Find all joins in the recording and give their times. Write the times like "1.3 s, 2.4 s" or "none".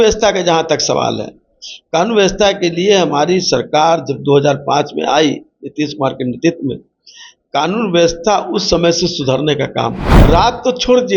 10.1 s